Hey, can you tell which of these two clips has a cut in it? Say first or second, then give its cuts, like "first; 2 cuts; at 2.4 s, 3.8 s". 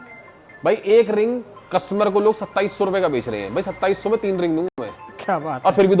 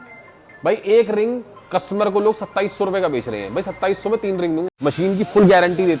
second; 1 cut; at 4.7 s